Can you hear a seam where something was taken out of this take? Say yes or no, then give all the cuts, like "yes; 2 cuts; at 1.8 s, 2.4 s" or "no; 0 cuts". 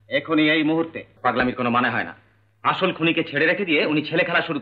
yes; 1 cut; at 1.0 s